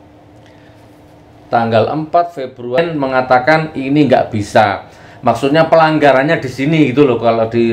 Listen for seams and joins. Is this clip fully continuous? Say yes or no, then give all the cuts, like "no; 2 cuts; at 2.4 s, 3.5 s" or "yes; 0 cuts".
no; 1 cut; at 2.8 s